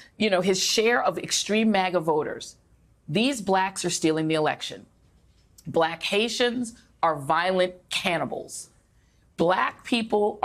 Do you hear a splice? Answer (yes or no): no